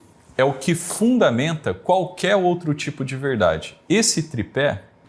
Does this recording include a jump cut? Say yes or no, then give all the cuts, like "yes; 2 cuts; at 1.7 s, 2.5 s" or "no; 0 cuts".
no; 0 cuts